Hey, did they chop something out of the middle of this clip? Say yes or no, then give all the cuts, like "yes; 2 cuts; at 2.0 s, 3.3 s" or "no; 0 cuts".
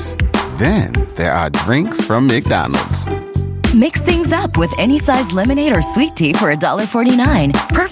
no; 0 cuts